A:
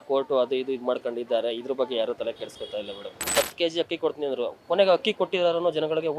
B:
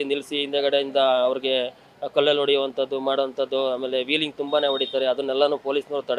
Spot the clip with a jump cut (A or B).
A